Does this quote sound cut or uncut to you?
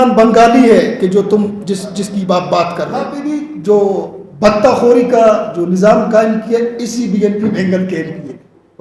cut